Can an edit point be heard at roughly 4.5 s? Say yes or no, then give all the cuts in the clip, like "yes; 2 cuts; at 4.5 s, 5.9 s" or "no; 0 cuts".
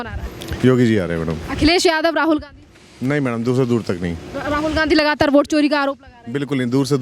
no; 0 cuts